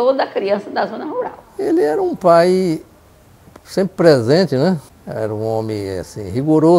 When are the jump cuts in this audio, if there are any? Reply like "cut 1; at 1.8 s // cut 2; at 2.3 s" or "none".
cut 1; at 1.4 s // cut 2; at 5.0 s